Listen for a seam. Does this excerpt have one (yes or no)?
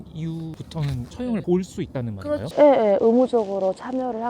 yes